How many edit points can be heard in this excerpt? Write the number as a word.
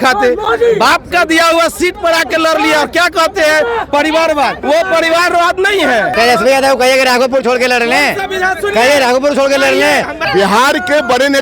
three